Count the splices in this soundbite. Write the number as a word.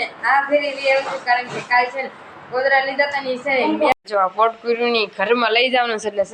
one